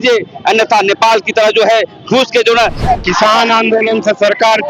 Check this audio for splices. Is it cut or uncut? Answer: cut